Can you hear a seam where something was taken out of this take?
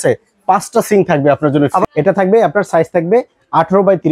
yes; 1 cut; at 1.8 s

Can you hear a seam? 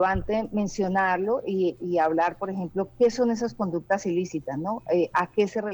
no; 0 cuts

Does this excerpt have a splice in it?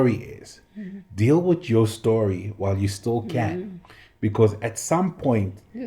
no; 0 cuts

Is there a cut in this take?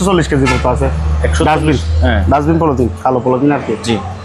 no; 0 cuts

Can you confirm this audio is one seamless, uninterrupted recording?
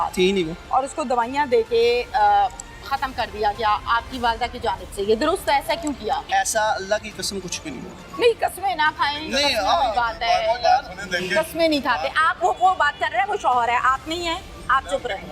no; 1 cut; at 6.3 s

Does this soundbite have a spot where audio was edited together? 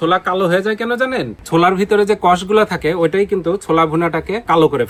no; 0 cuts

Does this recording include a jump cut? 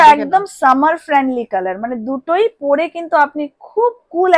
no; 0 cuts

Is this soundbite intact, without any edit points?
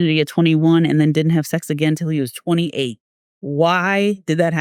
yes; 0 cuts

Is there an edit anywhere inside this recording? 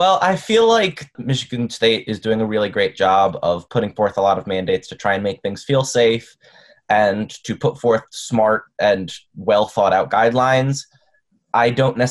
yes; 1 cut; at 1.3 s

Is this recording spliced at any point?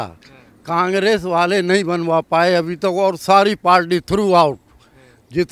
no; 0 cuts

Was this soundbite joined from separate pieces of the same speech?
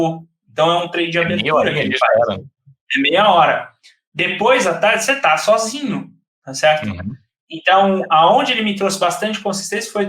no; 0 cuts

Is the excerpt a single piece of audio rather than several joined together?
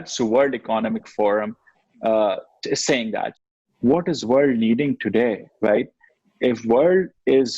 no; 1 cut; at 3.5 s

